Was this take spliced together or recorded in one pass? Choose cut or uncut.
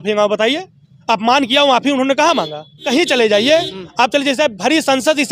cut